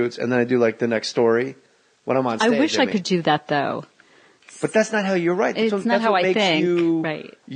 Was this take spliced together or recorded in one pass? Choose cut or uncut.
uncut